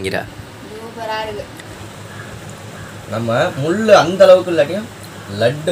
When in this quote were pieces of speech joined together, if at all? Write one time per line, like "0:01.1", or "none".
0:01.7